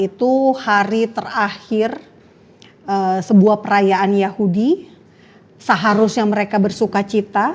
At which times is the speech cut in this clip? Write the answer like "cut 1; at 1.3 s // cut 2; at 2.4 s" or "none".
none